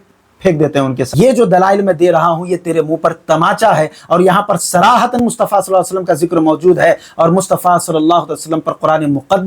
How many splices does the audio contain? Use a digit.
1